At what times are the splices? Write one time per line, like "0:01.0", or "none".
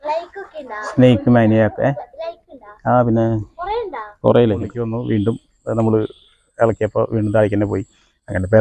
0:04.8